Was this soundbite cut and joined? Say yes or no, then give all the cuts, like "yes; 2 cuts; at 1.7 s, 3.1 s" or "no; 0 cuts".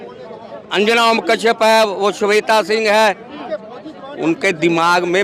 no; 0 cuts